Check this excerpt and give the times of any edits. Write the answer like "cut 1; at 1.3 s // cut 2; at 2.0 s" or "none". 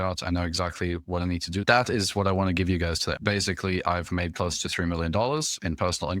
cut 1; at 1.6 s // cut 2; at 3.1 s